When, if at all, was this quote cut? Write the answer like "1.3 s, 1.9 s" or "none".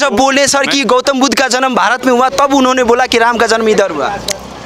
none